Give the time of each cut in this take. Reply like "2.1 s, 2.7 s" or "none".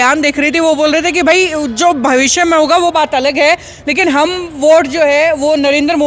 none